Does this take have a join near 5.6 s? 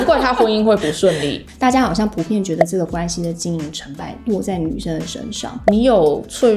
yes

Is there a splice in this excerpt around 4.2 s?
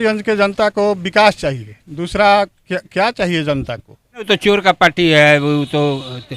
yes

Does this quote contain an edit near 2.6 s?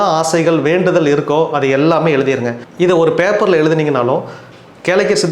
yes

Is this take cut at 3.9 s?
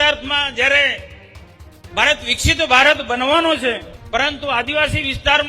yes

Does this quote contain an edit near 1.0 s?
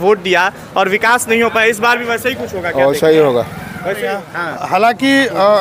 no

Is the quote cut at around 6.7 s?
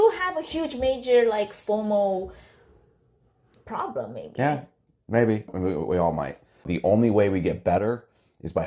yes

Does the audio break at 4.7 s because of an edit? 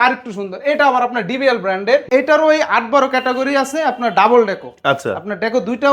no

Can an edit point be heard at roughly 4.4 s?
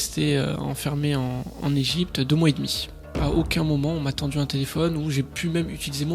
no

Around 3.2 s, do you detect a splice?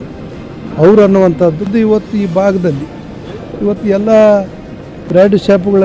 no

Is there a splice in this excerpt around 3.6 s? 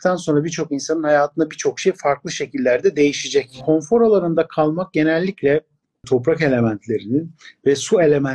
yes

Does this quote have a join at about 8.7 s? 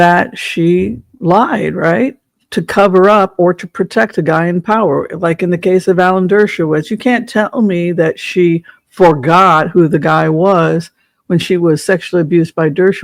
no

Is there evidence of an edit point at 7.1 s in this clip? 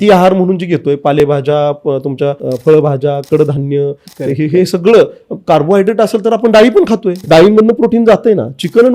yes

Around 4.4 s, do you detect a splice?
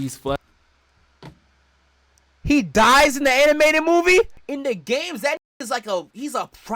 yes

